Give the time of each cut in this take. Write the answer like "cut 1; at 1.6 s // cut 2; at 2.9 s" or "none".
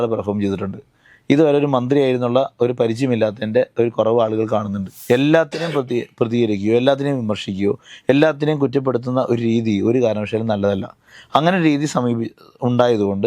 cut 1; at 4.9 s